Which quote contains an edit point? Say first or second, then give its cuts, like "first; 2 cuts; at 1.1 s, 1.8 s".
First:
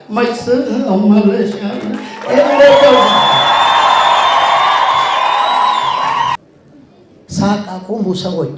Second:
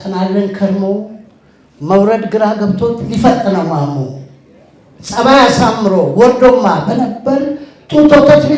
first; 1 cut; at 6.4 s